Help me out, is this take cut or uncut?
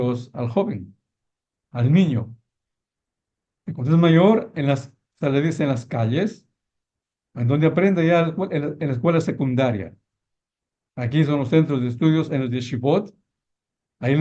uncut